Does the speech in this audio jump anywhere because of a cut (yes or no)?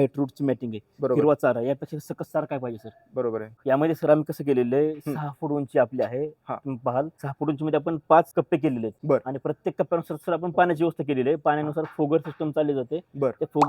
yes